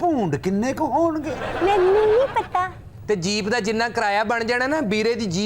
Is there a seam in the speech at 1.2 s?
no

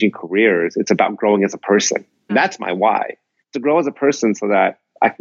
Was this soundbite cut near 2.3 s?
yes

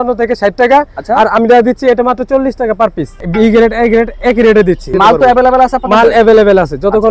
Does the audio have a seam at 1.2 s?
no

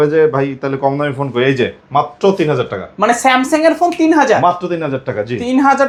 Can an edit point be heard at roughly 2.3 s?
no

